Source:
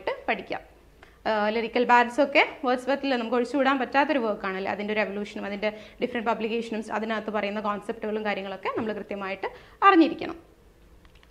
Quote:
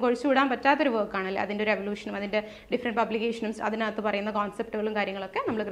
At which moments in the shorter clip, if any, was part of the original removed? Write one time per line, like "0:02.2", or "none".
none